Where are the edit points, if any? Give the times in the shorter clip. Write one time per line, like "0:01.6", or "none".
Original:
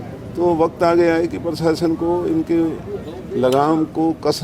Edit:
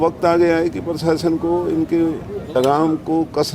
0:02.5